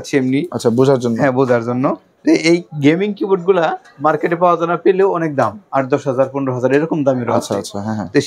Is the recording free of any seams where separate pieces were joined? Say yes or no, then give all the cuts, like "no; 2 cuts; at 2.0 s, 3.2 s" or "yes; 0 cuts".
yes; 0 cuts